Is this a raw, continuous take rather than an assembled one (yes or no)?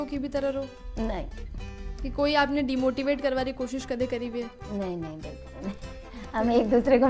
yes